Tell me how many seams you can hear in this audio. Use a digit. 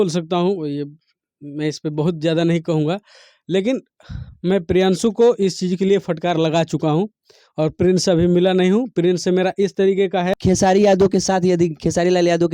1